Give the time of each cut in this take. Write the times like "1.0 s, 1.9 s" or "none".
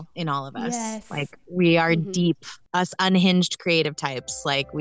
2.6 s